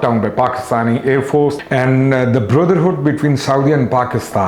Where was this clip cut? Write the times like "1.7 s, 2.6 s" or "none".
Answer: 1.6 s